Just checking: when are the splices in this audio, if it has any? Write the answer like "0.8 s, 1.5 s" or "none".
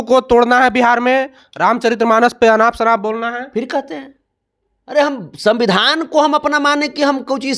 none